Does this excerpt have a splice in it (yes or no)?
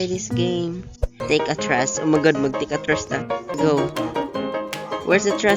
yes